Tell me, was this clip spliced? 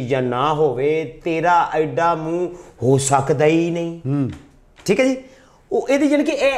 no; 0 cuts

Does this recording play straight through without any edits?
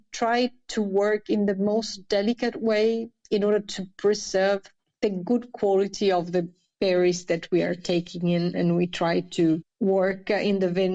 yes; 0 cuts

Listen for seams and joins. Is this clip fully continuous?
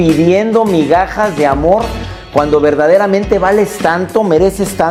yes; 0 cuts

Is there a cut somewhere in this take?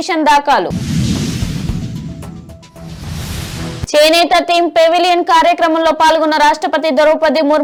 no; 0 cuts

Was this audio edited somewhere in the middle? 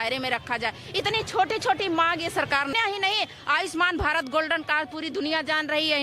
yes; 1 cut; at 2.7 s

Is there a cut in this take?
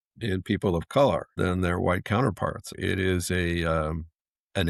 yes; 2 cuts; at 1.3 s, 2.8 s

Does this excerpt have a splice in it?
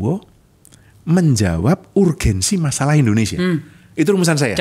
no; 0 cuts

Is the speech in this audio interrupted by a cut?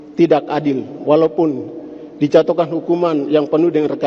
no; 0 cuts

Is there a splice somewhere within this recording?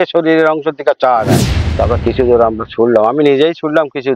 yes; 1 cut; at 1.7 s

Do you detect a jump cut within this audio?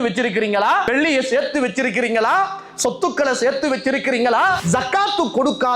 yes; 2 cuts; at 0.9 s, 4.6 s

